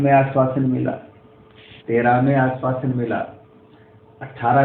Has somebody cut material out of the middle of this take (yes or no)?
no